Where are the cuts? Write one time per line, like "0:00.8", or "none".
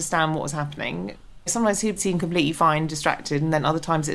0:01.5